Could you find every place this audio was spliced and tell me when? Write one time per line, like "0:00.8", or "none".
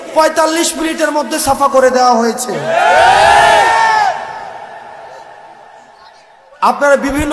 none